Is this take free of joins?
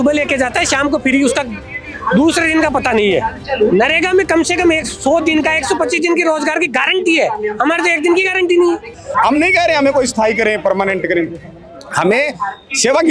no; 1 cut; at 9.0 s

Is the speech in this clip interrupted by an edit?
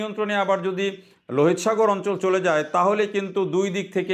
no; 0 cuts

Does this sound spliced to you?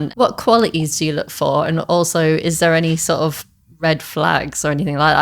no; 0 cuts

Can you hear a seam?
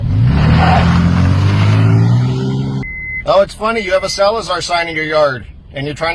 yes; 1 cut; at 3.3 s

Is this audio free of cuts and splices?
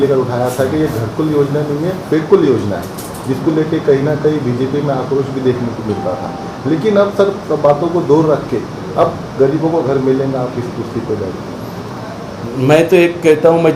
yes; 0 cuts

